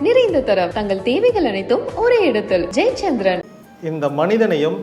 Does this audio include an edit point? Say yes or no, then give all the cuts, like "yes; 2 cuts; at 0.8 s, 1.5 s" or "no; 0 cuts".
yes; 1 cut; at 3.5 s